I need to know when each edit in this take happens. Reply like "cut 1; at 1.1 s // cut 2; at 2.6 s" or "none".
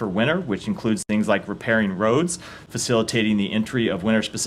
none